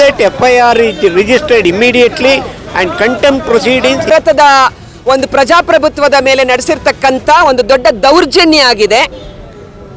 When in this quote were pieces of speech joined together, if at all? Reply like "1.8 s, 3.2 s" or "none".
4.1 s